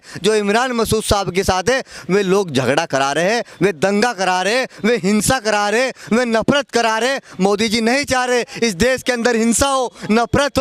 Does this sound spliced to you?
no; 0 cuts

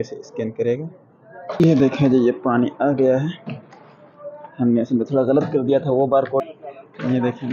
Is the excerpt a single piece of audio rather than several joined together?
no; 2 cuts; at 1.6 s, 6.5 s

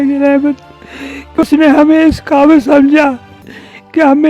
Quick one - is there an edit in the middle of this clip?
yes; 1 cut; at 1.4 s

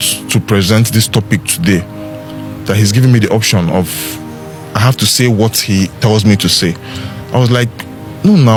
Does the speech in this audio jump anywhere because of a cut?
no; 0 cuts

